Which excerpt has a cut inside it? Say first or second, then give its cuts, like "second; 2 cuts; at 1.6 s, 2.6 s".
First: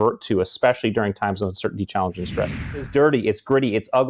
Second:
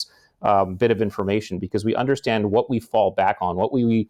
first; 1 cut; at 2.8 s